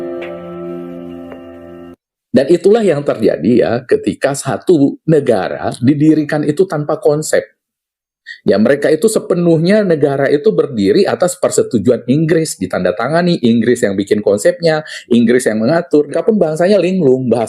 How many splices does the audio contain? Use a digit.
2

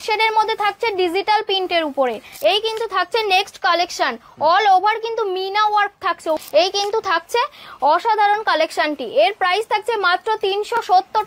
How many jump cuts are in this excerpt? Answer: 2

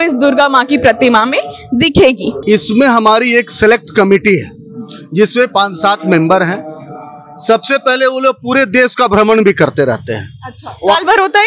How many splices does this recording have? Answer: 1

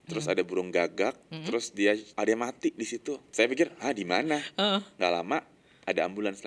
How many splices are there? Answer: 2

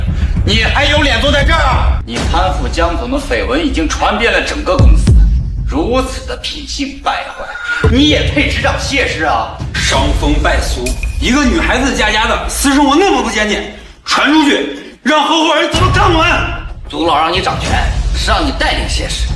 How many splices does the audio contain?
1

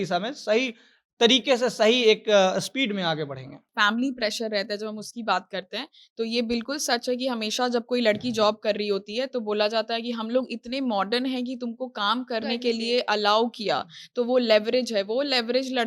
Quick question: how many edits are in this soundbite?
1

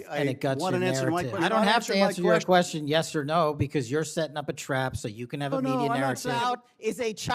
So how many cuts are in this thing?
2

